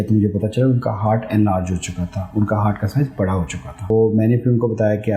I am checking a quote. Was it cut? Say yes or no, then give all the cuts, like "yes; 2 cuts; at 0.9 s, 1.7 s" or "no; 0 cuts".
yes; 1 cut; at 3.9 s